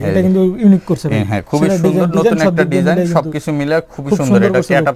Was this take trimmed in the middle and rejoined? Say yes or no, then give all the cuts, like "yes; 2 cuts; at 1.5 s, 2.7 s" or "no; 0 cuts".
no; 0 cuts